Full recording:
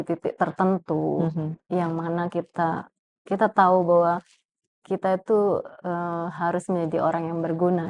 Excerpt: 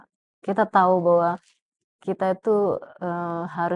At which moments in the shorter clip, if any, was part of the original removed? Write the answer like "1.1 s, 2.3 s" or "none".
none